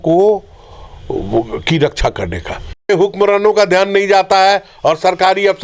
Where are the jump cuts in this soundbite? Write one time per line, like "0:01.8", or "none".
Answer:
0:02.9